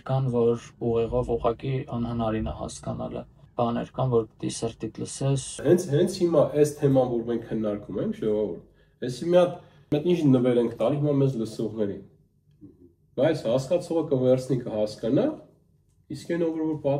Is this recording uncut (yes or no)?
no